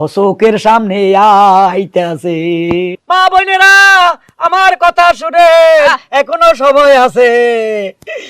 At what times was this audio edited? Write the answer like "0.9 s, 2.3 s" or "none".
2.9 s